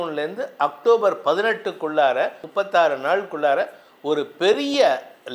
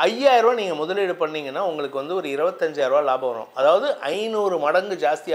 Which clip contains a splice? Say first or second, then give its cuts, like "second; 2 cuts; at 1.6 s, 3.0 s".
first; 1 cut; at 2.4 s